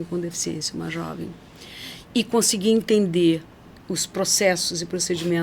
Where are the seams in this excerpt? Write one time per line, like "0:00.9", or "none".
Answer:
none